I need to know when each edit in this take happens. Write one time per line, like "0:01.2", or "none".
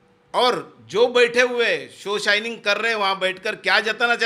none